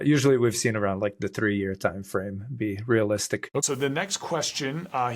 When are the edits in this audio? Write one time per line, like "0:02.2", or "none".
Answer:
0:03.6